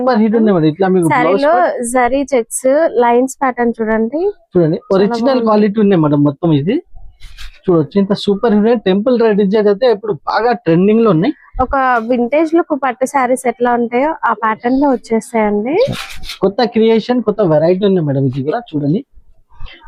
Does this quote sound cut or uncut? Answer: uncut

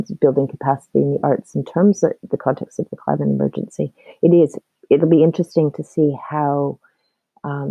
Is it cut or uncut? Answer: uncut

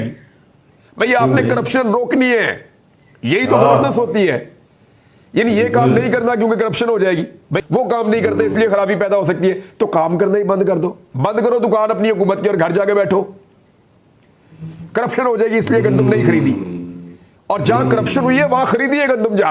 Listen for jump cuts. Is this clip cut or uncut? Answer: cut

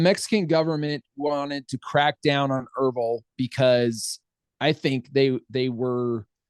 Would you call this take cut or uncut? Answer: uncut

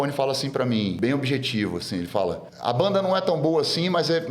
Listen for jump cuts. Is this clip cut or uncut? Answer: cut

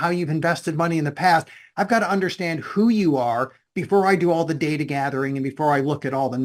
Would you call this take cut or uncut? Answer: uncut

